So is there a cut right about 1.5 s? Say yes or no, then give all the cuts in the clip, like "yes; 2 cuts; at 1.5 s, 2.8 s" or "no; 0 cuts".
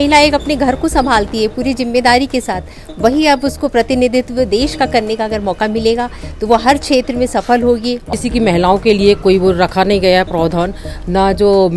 no; 1 cut; at 8.1 s